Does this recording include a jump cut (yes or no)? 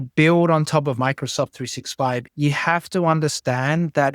yes